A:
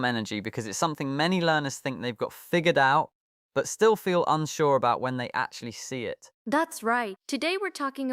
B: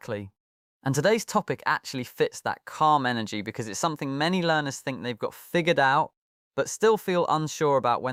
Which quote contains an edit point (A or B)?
A